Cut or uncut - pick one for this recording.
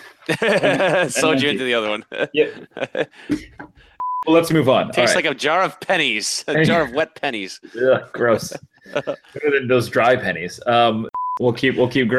cut